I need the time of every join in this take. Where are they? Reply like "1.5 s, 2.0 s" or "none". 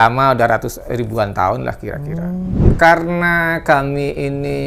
2.6 s